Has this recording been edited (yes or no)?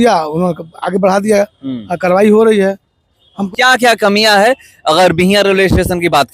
yes